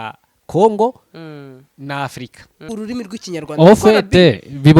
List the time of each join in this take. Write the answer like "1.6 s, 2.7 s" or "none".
2.7 s